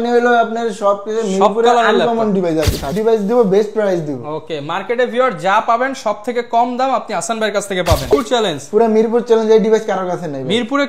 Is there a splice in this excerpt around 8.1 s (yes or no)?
yes